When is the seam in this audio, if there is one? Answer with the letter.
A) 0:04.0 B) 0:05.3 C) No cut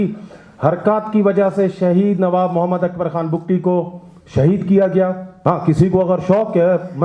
B